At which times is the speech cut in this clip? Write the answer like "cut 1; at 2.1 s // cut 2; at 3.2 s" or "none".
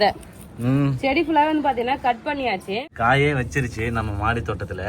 cut 1; at 2.8 s